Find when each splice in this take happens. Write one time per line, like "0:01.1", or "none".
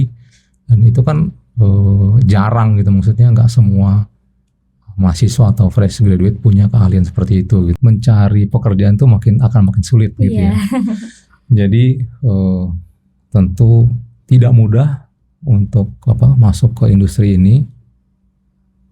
0:07.8